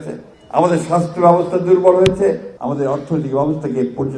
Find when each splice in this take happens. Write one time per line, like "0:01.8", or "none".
0:02.5